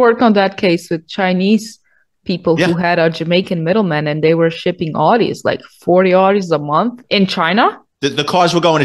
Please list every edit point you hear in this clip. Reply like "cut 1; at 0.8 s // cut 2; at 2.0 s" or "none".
cut 1; at 7.9 s